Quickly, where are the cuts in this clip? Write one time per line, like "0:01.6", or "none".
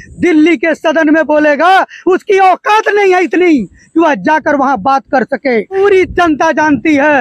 0:05.7

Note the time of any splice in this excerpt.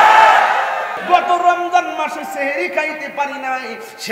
0:01.0

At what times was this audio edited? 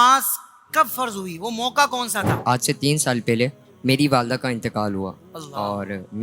0:02.4
0:03.7

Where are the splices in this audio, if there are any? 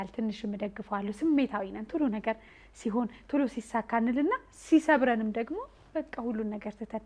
none

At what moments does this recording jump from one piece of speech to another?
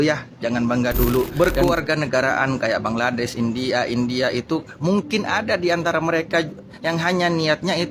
0:01.3

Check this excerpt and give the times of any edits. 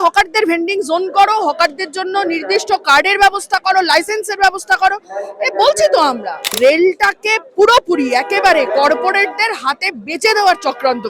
0:06.5

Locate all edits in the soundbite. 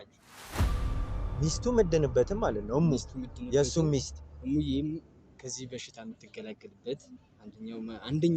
none

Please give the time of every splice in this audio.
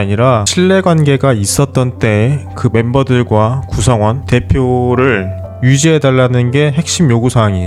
none

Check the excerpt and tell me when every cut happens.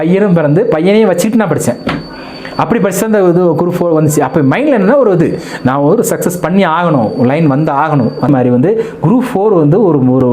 0:08.3

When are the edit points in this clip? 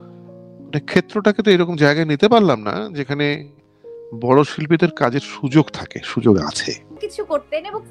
0:07.0

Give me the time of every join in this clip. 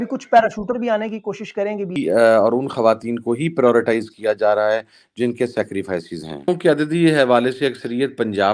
0:02.0
0:06.5

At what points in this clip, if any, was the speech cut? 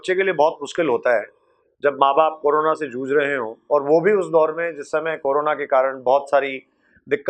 none

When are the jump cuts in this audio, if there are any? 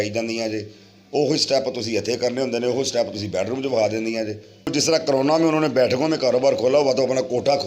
0:04.7

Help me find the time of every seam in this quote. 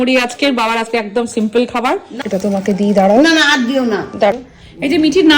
0:02.1
0:04.3

